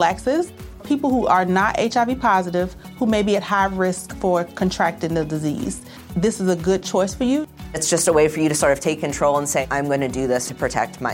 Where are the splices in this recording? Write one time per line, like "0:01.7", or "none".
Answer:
none